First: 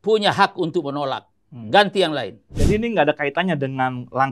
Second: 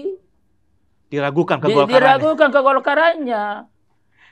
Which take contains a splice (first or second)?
first